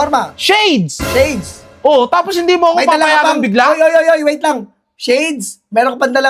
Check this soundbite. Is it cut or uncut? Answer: uncut